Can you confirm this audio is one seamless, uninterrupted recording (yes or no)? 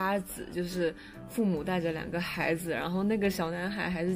yes